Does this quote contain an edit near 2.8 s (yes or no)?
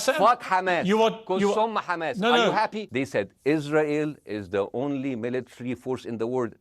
yes